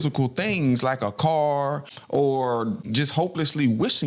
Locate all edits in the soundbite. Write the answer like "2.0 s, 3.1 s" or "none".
1.9 s, 2.9 s